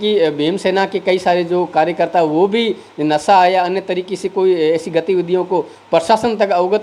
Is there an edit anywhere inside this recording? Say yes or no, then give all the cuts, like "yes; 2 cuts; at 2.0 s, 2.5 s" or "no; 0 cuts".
no; 0 cuts